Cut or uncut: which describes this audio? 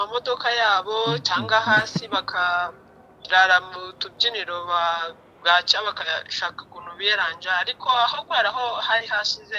uncut